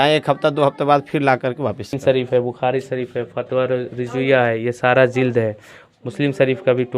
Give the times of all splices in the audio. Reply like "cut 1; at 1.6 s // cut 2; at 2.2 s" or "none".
cut 1; at 2.0 s